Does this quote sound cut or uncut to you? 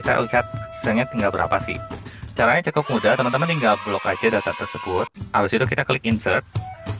uncut